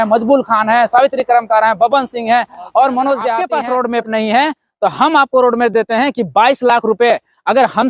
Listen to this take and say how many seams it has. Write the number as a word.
one